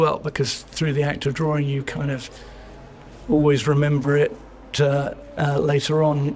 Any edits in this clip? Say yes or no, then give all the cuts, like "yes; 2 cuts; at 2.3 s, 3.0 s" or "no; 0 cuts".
no; 0 cuts